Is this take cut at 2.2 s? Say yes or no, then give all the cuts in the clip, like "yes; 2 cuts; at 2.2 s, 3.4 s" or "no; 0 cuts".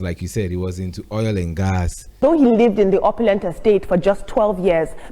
yes; 1 cut; at 2.2 s